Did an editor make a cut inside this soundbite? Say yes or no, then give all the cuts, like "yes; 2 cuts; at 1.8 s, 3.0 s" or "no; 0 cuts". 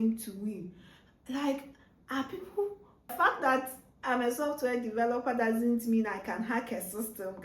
yes; 1 cut; at 3.1 s